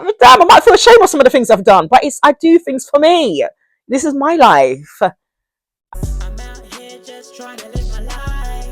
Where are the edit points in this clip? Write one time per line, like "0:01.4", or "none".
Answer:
0:05.7